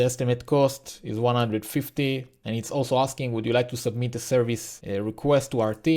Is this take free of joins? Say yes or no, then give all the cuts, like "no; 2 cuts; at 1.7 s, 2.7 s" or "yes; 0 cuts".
no; 2 cuts; at 2.4 s, 4.7 s